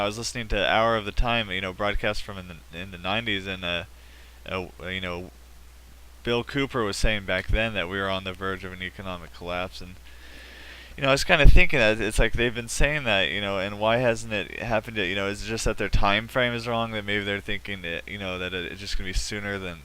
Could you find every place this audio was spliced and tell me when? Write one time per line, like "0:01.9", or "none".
0:11.0